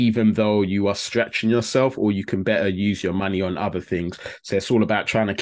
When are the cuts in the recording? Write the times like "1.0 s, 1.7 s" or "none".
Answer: none